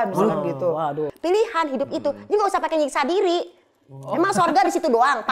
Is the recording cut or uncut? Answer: cut